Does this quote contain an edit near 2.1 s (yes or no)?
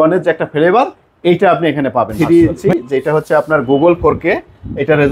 yes